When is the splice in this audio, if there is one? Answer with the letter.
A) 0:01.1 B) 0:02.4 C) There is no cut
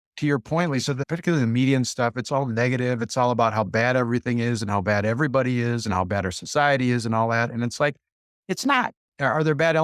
A